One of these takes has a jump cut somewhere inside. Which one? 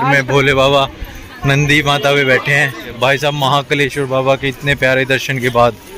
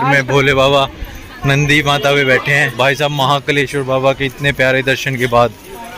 second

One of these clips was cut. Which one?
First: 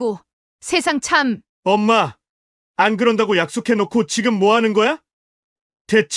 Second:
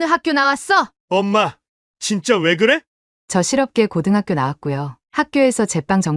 second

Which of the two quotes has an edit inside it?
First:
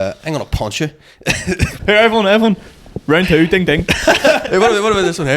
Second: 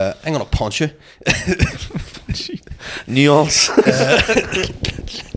first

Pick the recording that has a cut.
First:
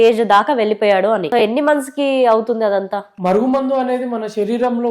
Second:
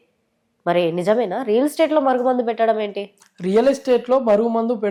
first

